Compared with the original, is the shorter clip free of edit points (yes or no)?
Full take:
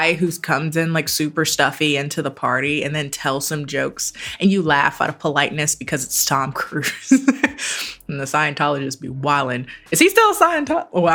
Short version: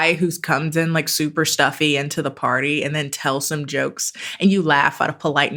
yes